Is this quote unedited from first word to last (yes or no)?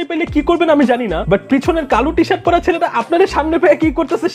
yes